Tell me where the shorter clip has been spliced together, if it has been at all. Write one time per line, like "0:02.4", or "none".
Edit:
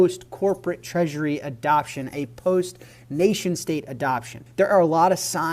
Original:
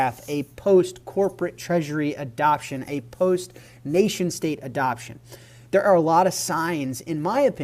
0:04.4

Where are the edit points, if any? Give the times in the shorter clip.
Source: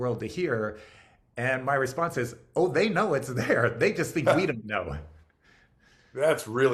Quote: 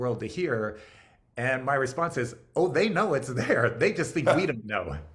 none

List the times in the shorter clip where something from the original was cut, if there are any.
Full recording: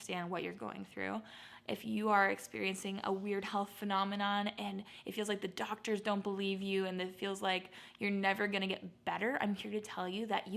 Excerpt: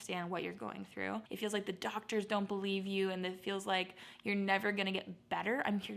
0:01.3

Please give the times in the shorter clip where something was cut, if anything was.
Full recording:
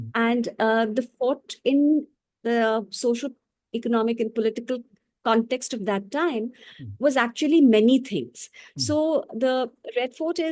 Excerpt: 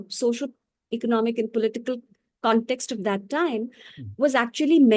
none

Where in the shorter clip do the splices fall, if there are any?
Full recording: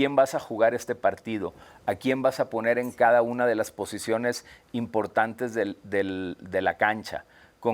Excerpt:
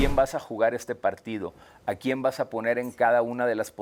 none

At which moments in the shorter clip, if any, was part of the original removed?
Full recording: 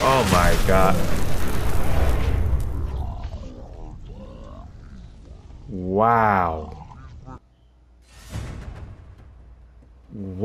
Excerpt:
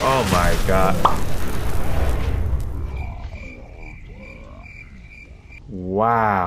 none

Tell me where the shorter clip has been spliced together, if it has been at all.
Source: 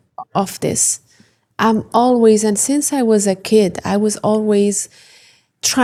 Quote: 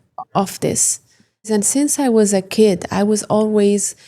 0:01.5

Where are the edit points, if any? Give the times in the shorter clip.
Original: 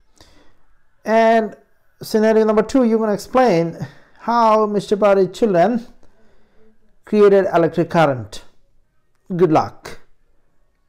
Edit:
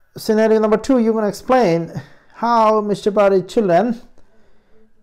none

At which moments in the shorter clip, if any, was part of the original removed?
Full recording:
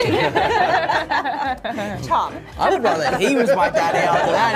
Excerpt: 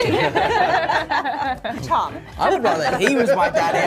0:01.8

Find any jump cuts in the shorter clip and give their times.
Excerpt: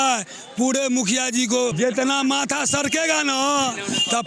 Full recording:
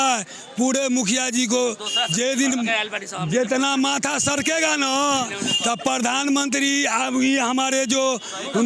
0:01.7

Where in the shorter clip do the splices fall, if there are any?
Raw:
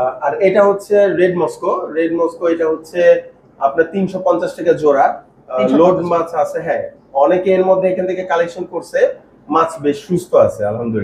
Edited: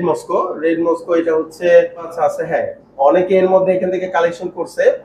0:02.1

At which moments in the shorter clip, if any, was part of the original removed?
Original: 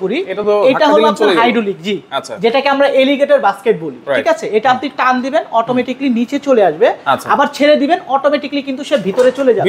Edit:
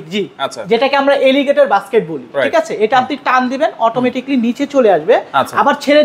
none

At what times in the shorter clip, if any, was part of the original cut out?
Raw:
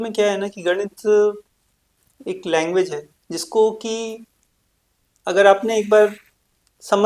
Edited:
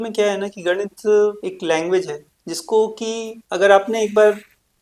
0:01.4
0:03.4

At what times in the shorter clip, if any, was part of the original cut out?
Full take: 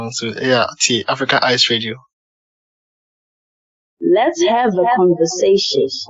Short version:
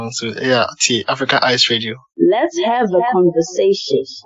0:02.0

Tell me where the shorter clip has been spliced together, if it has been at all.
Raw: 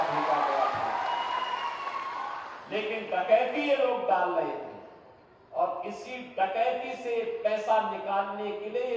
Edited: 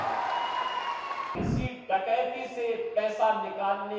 0:01.4

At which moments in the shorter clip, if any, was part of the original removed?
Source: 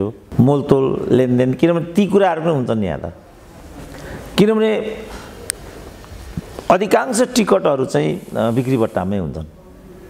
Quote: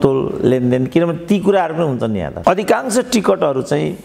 0:02.3

